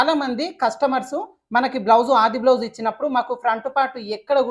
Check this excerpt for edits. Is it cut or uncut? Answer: uncut